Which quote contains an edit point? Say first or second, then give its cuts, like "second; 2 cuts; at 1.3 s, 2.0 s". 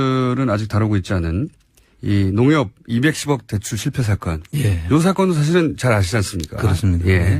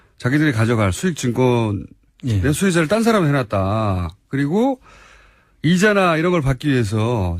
first; 1 cut; at 5.2 s